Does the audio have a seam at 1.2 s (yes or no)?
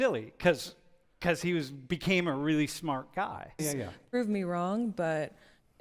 no